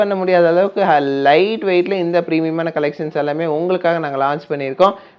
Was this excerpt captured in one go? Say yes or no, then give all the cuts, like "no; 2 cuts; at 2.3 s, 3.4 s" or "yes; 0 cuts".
yes; 0 cuts